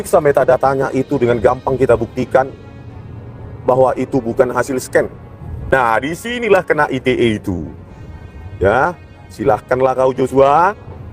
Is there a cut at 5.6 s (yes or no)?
yes